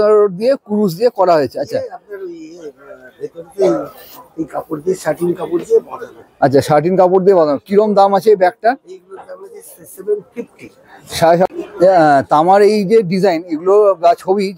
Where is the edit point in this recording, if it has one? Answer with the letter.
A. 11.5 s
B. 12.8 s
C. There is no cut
A